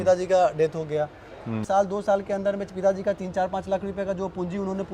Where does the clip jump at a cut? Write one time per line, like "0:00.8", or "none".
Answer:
0:01.5